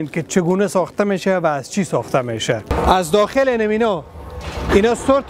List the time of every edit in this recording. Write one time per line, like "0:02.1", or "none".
0:02.7

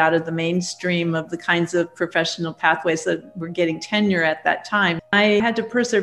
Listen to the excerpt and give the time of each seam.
0:05.1

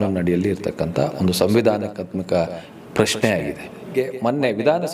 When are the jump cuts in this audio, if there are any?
0:03.9

